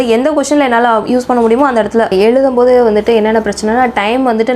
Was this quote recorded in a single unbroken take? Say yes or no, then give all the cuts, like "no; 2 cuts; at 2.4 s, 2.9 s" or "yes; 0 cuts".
no; 1 cut; at 2.1 s